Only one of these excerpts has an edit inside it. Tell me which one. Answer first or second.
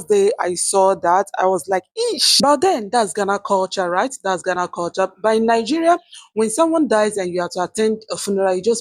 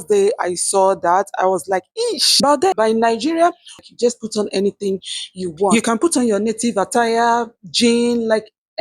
second